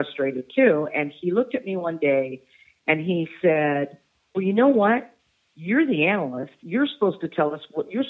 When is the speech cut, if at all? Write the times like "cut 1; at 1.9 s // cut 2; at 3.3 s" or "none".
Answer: none